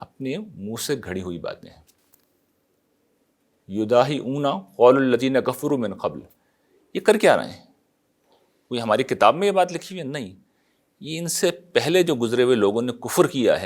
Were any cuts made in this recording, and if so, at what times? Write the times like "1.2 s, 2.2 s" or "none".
none